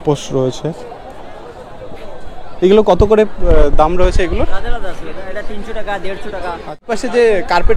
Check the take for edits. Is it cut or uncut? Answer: cut